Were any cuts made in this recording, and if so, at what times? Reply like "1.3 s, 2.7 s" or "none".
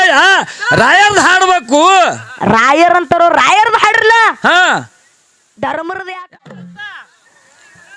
6.2 s